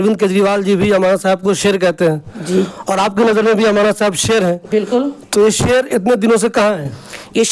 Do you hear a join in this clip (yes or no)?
no